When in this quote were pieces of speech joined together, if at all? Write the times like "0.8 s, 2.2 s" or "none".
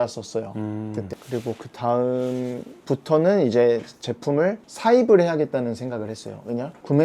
1.2 s